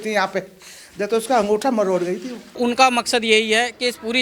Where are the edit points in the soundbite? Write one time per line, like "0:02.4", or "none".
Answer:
0:02.6